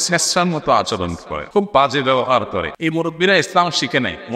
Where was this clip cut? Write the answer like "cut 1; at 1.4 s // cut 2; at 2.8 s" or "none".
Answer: cut 1; at 1.3 s // cut 2; at 2.7 s